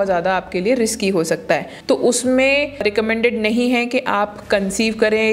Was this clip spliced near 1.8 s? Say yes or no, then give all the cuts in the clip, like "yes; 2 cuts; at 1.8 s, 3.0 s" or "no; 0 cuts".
yes; 2 cuts; at 1.8 s, 2.8 s